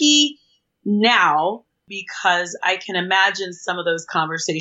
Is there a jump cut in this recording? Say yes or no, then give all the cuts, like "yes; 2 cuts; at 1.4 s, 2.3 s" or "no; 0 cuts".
yes; 1 cut; at 1.8 s